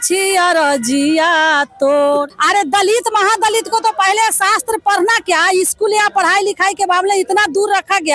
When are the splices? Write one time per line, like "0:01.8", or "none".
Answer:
0:02.3